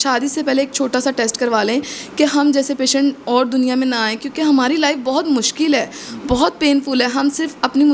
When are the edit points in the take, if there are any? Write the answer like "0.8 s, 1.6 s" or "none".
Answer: none